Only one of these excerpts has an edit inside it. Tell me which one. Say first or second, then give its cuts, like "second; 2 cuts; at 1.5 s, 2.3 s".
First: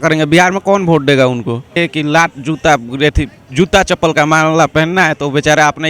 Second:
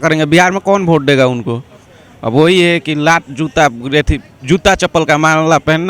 first; 1 cut; at 1.8 s